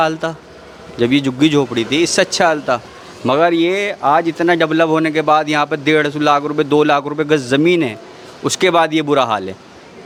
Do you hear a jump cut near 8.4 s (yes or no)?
no